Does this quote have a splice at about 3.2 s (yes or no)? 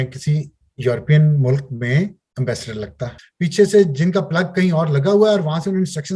yes